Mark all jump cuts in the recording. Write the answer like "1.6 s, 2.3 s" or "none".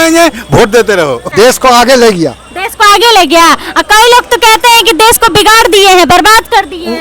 1.3 s